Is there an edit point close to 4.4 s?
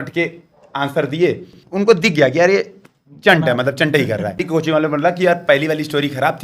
yes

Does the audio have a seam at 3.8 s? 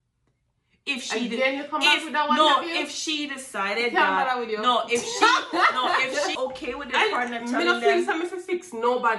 no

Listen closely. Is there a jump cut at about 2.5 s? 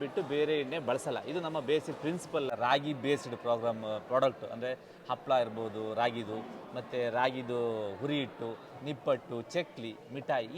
yes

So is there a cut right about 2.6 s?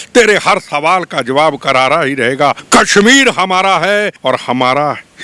yes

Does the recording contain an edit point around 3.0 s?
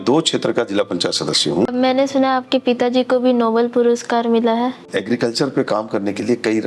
no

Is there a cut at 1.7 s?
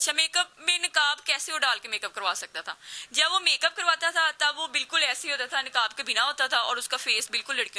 no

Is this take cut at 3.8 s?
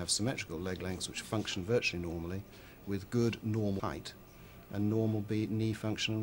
yes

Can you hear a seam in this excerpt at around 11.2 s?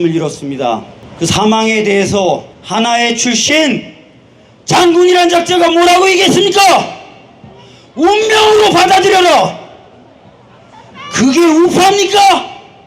no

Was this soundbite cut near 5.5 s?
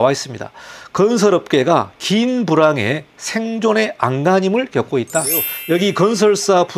yes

